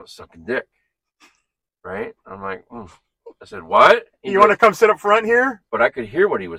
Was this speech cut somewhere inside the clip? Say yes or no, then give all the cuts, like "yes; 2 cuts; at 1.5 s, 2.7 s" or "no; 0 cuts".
yes; 2 cuts; at 4.2 s, 5.6 s